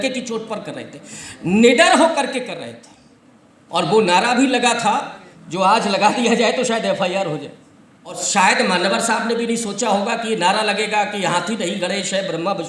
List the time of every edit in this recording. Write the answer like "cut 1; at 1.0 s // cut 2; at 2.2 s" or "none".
cut 1; at 8.2 s